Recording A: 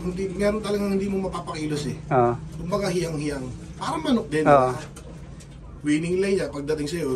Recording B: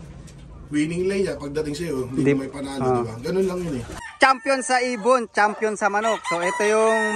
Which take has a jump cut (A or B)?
B